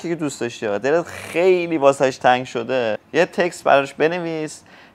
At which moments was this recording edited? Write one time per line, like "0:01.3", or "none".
0:03.0